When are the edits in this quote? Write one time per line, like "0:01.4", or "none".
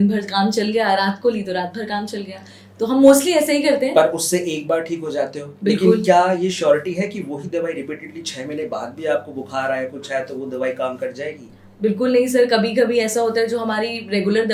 none